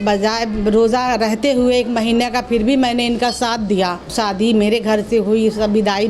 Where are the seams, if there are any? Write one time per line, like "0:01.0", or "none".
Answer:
0:04.1